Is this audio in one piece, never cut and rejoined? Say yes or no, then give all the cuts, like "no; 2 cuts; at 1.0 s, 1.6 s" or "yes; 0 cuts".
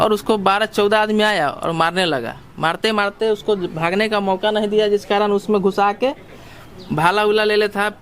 yes; 0 cuts